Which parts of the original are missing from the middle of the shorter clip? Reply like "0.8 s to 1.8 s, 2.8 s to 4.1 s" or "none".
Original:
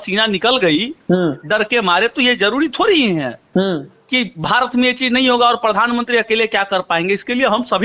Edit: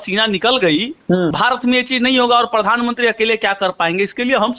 1.3 s to 4.4 s